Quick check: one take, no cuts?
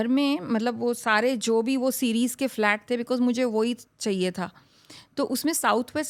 yes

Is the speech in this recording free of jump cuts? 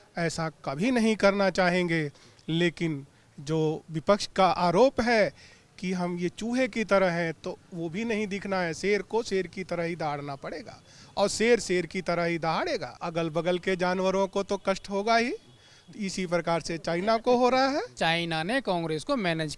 no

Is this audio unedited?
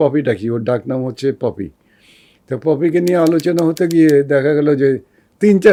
yes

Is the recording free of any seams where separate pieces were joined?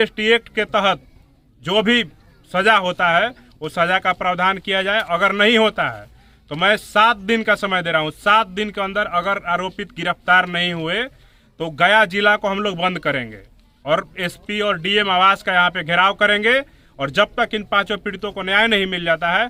yes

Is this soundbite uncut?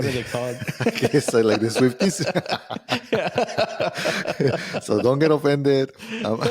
yes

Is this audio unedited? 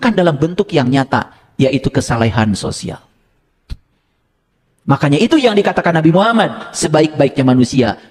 yes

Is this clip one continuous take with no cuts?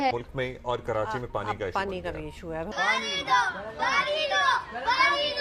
yes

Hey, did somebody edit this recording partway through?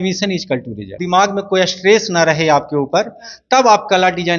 yes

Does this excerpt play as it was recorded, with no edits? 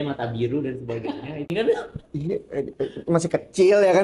no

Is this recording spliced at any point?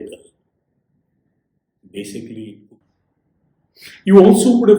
yes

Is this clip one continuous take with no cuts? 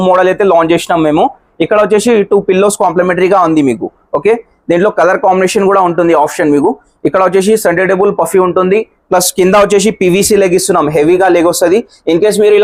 yes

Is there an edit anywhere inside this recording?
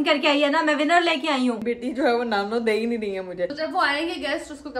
yes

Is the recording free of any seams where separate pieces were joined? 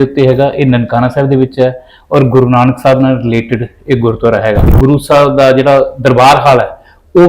no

